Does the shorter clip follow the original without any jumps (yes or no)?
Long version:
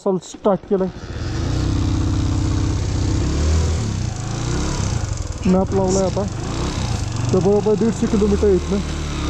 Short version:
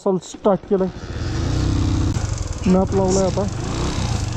no